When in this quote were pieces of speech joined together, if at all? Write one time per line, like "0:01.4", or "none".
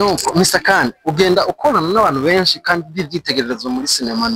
none